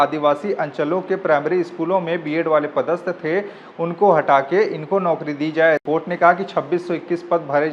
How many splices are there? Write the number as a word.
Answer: one